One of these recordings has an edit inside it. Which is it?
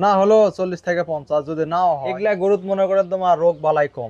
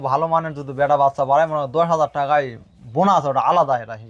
first; 1 cut; at 2.1 s

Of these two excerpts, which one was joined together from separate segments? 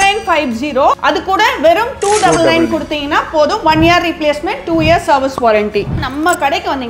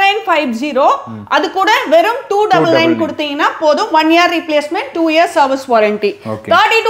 first; 2 cuts; at 1.0 s, 6.0 s

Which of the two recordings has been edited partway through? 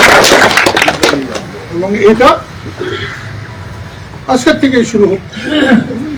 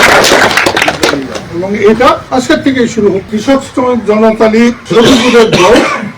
second; 4 cuts; at 1.4 s, 2.2 s, 3.3 s, 4.8 s

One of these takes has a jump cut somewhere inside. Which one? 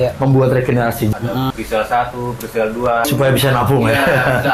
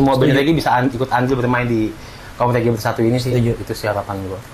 first; 2 cuts; at 1.1 s, 3.1 s

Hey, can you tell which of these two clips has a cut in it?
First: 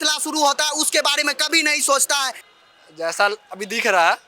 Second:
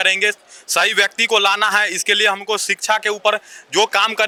first; 1 cut; at 2.4 s

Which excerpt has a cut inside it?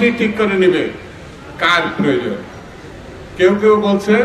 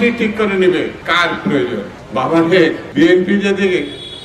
second; 3 cuts; at 1.0 s, 2.0 s, 2.8 s

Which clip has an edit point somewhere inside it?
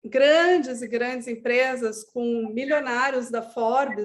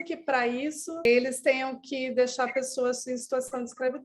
second; 1 cut; at 1.1 s

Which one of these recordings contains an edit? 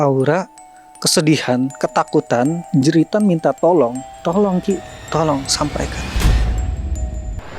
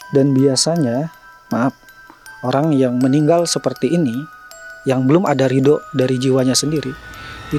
first; 3 cuts; at 2.6 s, 4.1 s, 6.0 s

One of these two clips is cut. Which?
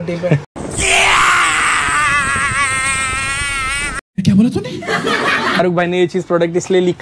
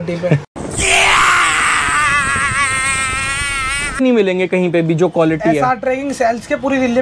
second; 1 cut; at 4.0 s

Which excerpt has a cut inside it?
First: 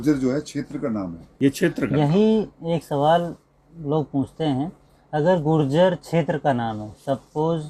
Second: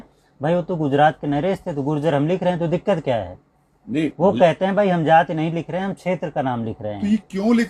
first; 1 cut; at 1.2 s

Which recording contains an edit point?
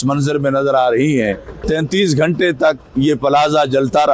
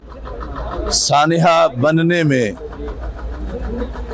first; 1 cut; at 1.5 s

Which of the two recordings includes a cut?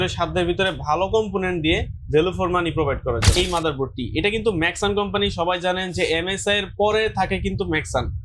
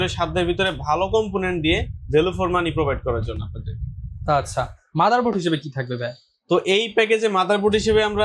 first; 1 cut; at 3.3 s

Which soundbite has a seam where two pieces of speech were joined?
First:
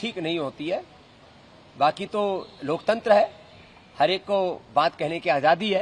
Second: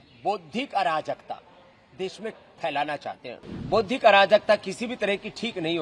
second; 1 cut; at 3.3 s

